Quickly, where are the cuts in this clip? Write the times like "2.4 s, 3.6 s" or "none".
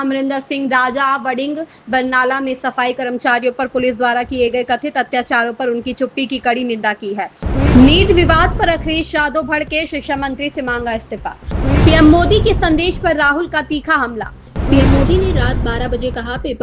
7.4 s, 11.5 s, 14.4 s